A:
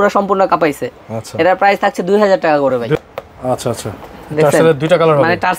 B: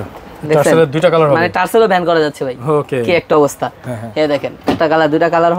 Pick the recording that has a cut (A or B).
A